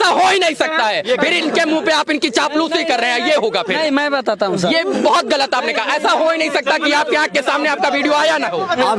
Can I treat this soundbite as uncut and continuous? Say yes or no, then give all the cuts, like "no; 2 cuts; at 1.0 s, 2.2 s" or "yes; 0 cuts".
yes; 0 cuts